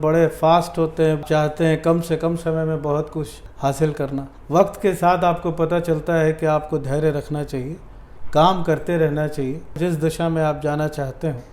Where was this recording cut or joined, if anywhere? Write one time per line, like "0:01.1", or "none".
0:01.2
0:09.8